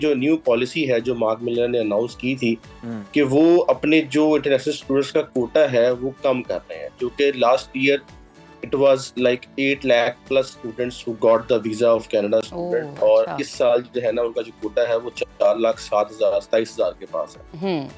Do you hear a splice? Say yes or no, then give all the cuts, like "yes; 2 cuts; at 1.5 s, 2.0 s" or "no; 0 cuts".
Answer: no; 0 cuts